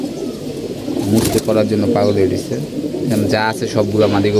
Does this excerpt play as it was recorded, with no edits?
yes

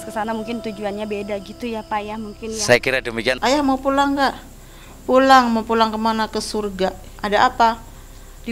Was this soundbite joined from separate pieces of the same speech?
yes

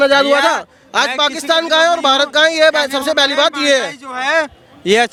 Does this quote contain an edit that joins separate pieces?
no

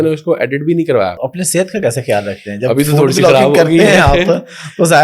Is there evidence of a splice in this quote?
yes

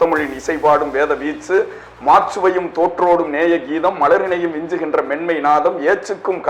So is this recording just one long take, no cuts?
yes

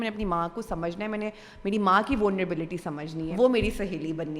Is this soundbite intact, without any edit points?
no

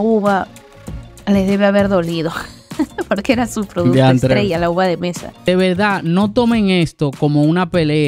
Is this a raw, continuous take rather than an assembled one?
no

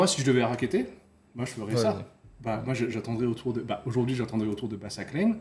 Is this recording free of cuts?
yes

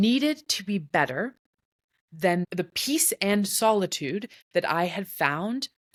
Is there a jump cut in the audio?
no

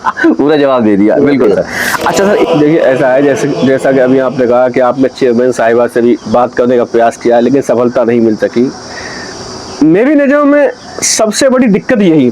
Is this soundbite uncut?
no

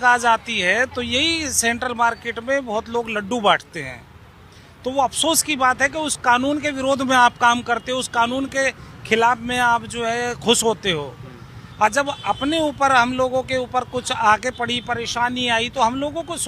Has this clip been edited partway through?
no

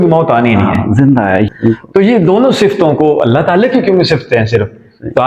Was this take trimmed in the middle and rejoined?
yes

